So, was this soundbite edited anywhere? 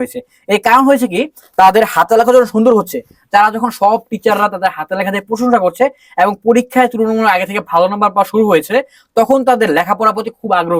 no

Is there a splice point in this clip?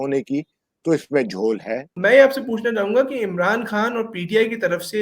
yes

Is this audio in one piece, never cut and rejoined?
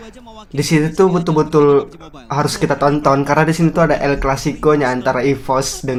yes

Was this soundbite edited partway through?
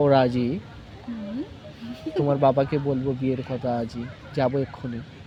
no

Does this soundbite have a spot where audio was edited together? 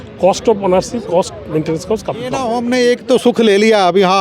yes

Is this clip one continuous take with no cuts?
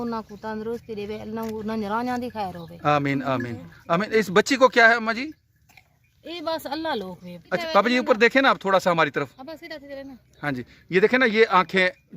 no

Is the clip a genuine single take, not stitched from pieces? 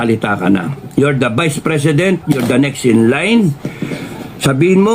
yes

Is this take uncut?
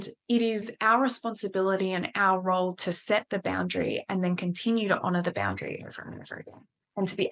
yes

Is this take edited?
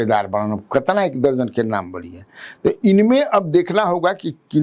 no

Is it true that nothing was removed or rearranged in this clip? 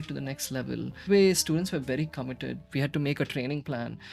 no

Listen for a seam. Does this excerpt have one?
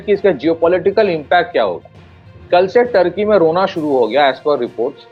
no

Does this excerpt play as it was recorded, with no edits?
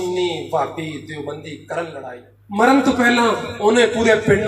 no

